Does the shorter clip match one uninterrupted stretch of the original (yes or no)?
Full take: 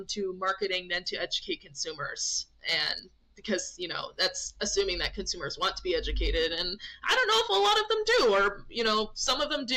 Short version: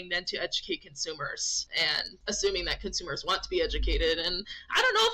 no